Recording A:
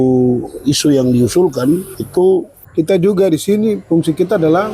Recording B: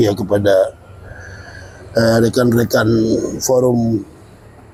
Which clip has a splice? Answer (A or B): A